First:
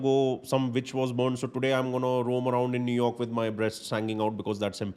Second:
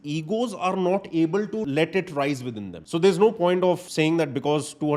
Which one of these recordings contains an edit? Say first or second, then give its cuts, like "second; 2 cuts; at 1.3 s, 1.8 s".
second; 3 cuts; at 1.6 s, 2.7 s, 3.9 s